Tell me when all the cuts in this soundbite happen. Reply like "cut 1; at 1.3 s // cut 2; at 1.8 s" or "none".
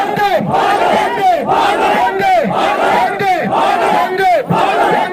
none